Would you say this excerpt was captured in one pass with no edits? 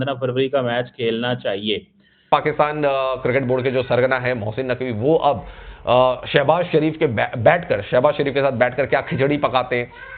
no; 1 cut; at 2.3 s

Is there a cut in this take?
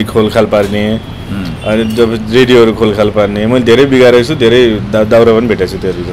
no; 0 cuts

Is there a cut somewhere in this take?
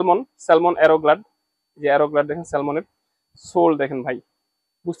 no; 0 cuts

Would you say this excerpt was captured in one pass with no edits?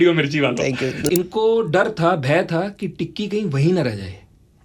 no; 1 cut; at 1.1 s

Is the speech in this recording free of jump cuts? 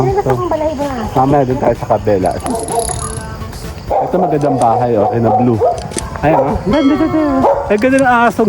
no; 1 cut; at 2.4 s

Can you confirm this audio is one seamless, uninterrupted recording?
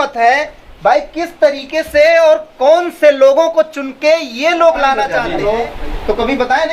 no; 1 cut; at 5.2 s

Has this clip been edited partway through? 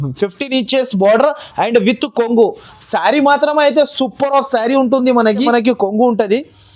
yes; 1 cut; at 5.5 s

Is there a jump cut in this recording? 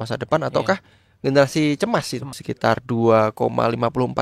yes; 1 cut; at 2.4 s

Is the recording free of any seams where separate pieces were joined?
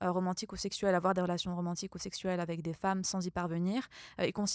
yes; 0 cuts

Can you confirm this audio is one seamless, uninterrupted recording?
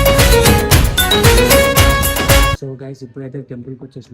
no; 1 cut; at 2.7 s

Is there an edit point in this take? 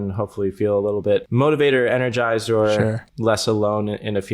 yes; 2 cuts; at 1.3 s, 3.1 s

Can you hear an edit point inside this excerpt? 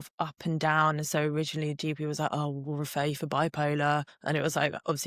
yes; 1 cut; at 4.1 s

